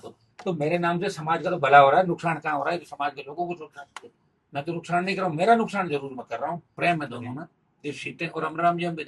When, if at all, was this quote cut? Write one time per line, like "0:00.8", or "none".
0:06.7